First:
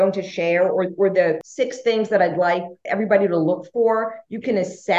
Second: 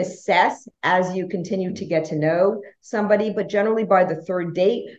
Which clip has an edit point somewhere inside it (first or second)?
first